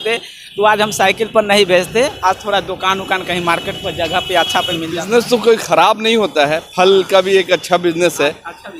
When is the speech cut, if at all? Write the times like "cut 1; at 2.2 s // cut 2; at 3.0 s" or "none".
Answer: none